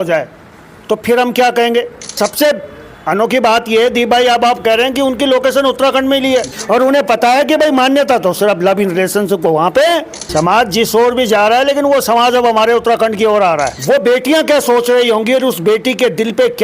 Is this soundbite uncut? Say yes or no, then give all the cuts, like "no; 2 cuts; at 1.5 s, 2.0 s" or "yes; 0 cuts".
no; 4 cuts; at 2.1 s, 6.5 s, 10.2 s, 13.8 s